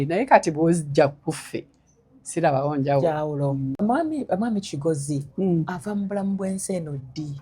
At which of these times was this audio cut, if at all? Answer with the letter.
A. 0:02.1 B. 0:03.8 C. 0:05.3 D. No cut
B